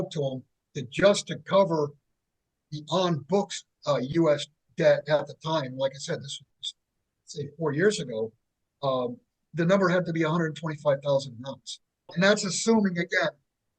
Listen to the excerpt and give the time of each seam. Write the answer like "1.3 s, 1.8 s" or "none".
12.1 s